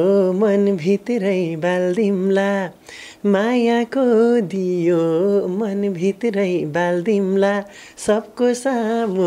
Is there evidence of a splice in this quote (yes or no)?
no